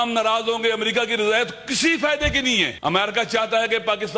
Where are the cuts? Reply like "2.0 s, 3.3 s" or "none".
2.7 s